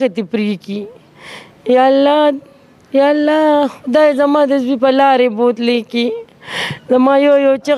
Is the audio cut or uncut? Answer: uncut